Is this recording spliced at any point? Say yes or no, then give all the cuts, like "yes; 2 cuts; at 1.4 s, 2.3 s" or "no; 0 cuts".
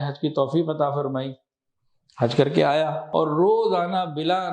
yes; 1 cut; at 3.0 s